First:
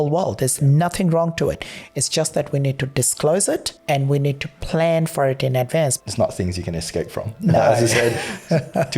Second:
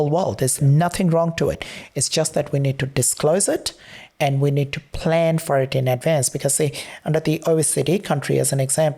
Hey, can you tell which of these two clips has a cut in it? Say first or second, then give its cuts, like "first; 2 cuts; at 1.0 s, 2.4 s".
first; 2 cuts; at 3.7 s, 6.0 s